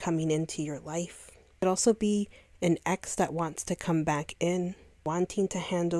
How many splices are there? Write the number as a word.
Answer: two